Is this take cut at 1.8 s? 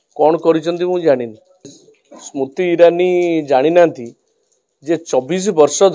yes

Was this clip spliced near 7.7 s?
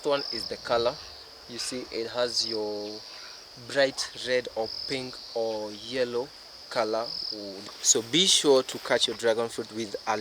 yes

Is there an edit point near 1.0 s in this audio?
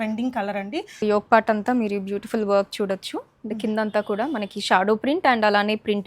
yes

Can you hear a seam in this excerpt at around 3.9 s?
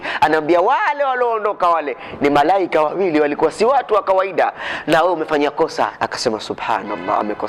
no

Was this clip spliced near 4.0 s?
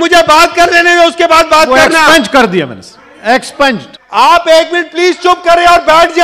yes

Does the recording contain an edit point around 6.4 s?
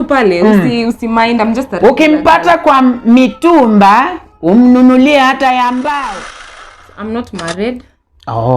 yes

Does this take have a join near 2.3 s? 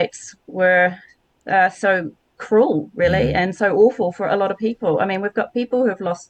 no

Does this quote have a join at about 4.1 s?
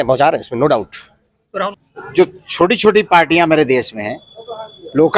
no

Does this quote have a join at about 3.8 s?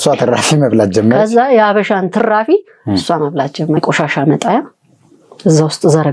yes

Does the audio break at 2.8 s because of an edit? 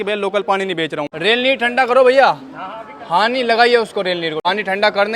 no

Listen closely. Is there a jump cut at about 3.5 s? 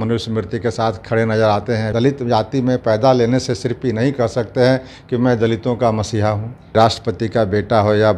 no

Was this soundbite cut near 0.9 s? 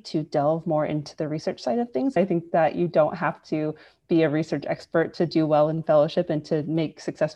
no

